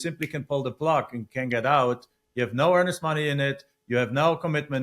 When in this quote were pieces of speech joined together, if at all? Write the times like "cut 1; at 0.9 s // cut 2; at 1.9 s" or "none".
none